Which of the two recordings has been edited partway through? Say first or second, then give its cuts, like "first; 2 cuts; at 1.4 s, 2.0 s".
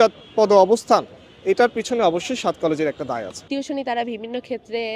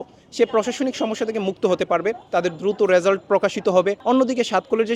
first; 1 cut; at 3.4 s